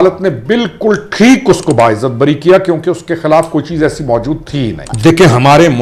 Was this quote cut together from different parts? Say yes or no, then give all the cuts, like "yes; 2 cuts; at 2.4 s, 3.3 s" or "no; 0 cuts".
yes; 1 cut; at 4.8 s